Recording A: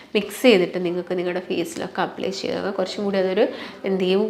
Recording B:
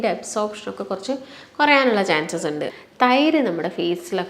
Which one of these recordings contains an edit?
B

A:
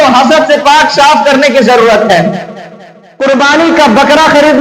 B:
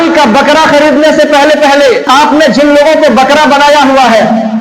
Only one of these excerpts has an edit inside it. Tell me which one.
B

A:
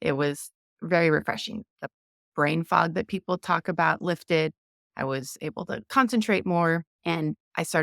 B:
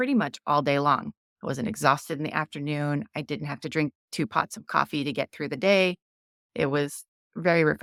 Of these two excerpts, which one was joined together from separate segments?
A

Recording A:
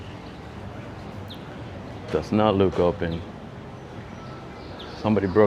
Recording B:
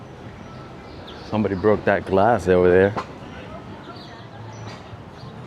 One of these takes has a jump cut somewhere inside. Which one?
B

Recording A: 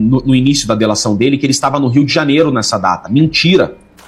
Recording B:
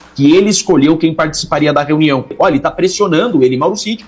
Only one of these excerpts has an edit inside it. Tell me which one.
B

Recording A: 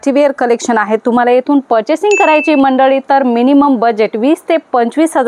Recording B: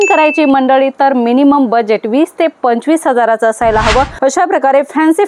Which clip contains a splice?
B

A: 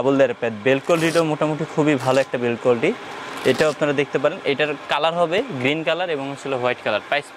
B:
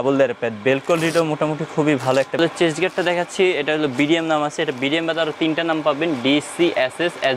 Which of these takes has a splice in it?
B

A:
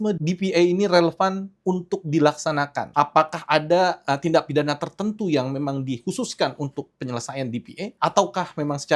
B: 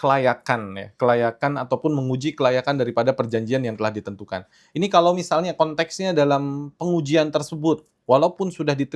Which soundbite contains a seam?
A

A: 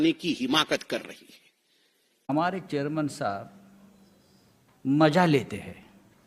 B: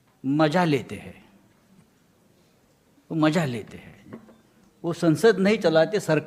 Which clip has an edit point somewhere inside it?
A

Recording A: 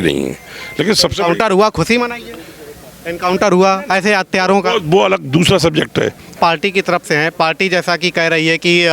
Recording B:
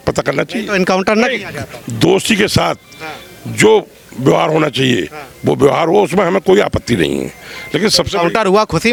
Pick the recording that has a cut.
A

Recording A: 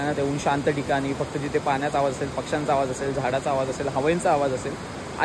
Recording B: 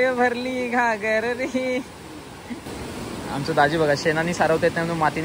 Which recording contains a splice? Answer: B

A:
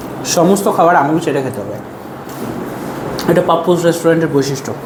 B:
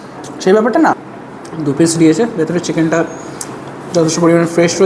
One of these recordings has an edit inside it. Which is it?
B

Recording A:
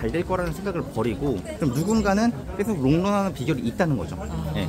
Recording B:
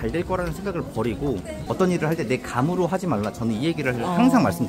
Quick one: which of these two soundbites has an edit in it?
B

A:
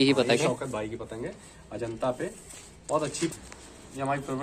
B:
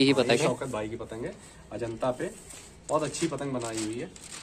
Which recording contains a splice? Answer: A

